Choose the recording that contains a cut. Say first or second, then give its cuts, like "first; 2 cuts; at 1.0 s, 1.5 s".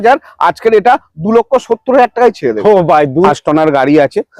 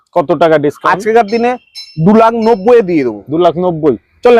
first; 1 cut; at 3.3 s